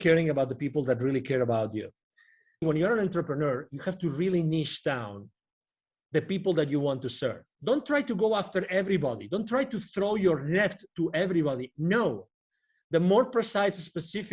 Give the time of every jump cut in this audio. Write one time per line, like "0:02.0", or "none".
0:02.6
0:07.5